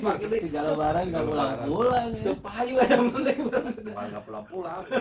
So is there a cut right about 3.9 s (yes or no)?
yes